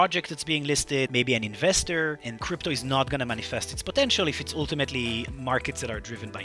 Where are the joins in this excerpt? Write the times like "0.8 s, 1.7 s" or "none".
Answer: 1.1 s, 2.3 s, 5.3 s